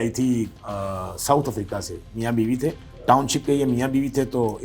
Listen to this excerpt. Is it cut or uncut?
cut